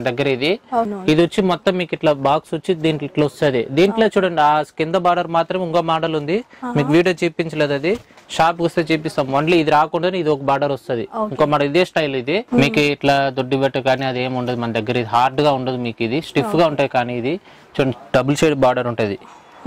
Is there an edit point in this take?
yes; 2 cuts; at 0.9 s, 12.4 s

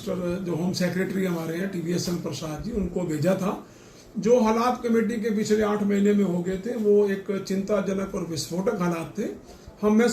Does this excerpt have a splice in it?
no; 0 cuts

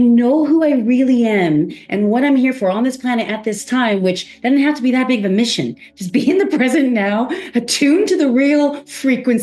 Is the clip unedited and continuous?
yes; 0 cuts

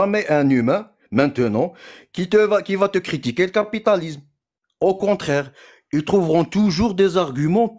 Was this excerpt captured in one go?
yes; 0 cuts

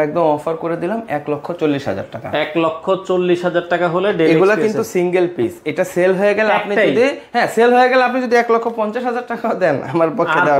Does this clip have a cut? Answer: no; 0 cuts

